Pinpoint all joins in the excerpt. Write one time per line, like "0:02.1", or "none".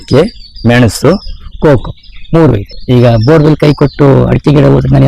0:02.7